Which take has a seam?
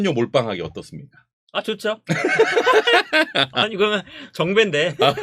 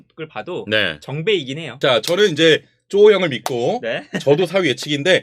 second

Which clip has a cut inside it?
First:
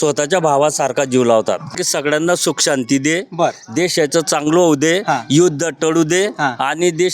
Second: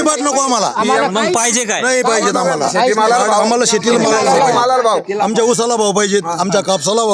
first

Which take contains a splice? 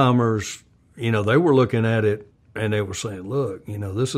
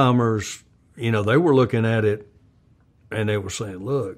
first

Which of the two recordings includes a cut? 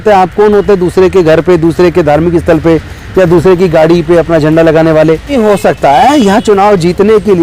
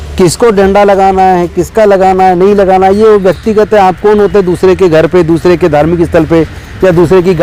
first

